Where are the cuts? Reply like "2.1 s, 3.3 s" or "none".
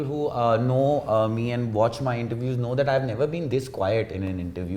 none